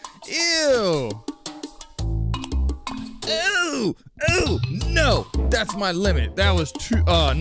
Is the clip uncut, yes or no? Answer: yes